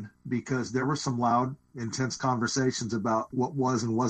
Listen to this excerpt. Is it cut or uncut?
cut